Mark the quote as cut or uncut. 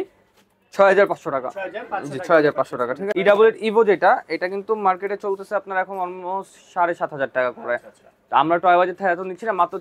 cut